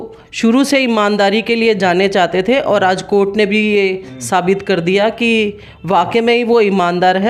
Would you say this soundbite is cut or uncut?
uncut